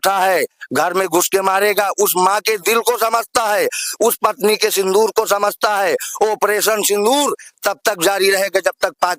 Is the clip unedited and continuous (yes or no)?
yes